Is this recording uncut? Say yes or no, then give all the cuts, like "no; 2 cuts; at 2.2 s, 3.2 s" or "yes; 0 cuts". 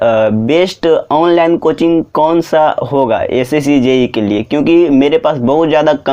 yes; 0 cuts